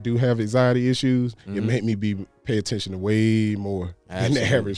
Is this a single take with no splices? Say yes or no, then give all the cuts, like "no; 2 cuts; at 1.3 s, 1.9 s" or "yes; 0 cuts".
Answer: yes; 0 cuts